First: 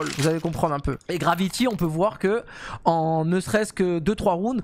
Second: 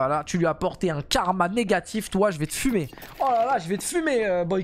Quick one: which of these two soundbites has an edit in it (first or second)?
first